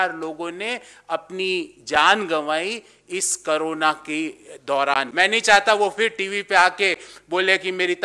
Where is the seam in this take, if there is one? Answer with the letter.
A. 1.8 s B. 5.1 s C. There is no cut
B